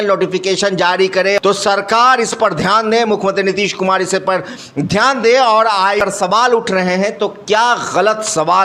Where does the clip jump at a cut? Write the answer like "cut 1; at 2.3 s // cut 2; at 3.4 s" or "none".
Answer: cut 1; at 1.4 s // cut 2; at 6.0 s